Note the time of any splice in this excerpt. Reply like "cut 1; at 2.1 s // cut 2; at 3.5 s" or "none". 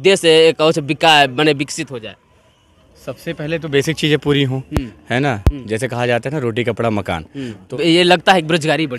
cut 1; at 7.7 s